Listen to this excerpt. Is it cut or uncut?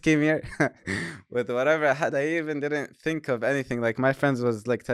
uncut